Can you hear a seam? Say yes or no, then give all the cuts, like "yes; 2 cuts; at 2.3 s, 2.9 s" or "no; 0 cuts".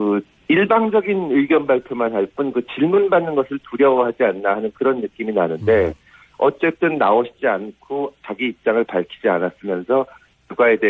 no; 0 cuts